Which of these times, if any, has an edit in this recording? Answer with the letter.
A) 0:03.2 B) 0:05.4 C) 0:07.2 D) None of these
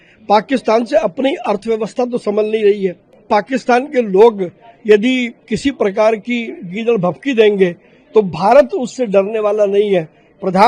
A